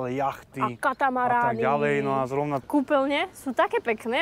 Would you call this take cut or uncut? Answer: cut